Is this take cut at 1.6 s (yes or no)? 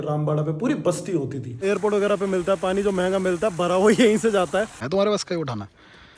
yes